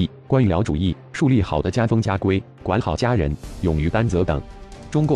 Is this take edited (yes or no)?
yes